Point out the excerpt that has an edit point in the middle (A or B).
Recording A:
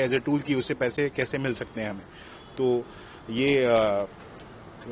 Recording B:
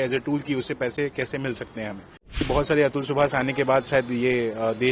B